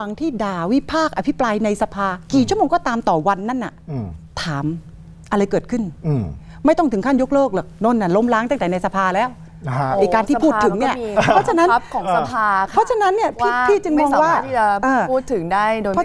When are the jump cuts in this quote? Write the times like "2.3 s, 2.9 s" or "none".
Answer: none